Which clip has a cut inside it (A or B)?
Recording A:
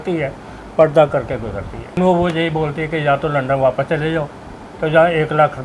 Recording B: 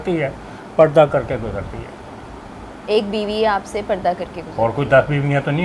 A